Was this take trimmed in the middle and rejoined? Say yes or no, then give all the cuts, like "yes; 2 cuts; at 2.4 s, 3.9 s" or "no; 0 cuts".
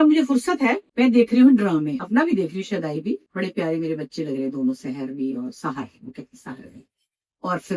yes; 3 cuts; at 0.8 s, 2.0 s, 3.3 s